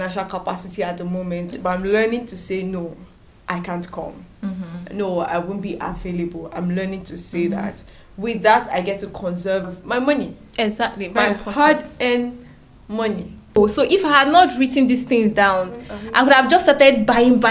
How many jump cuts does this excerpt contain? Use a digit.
4